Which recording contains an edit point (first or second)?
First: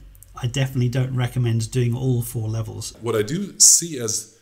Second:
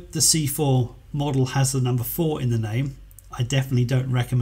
first